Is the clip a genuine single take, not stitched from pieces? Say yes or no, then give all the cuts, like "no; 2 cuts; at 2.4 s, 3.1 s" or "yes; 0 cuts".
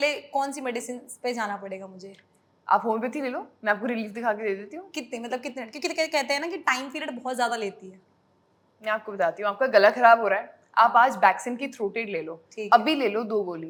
yes; 0 cuts